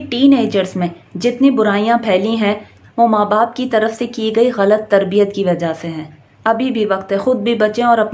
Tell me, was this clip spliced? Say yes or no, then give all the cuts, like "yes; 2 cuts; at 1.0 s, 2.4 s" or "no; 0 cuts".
yes; 1 cut; at 6.3 s